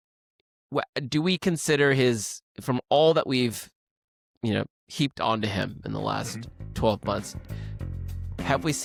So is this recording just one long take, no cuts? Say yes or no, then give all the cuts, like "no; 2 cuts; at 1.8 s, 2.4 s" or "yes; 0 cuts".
yes; 0 cuts